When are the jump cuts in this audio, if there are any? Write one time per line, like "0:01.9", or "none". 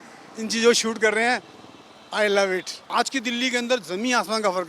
0:02.8